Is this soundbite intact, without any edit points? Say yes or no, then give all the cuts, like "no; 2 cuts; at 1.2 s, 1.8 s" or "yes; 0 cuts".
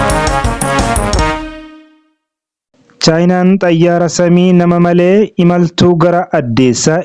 yes; 0 cuts